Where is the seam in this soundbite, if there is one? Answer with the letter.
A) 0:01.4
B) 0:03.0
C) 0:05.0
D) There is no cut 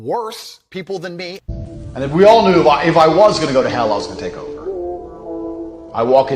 A